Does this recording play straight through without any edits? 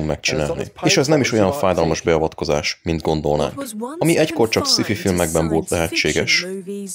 no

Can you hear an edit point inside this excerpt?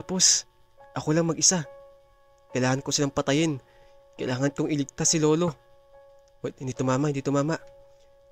no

